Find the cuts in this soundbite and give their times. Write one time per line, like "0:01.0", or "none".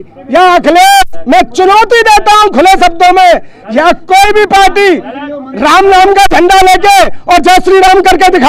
none